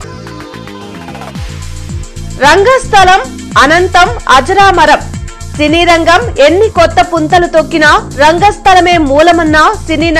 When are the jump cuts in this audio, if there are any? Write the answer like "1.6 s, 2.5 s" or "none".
1.8 s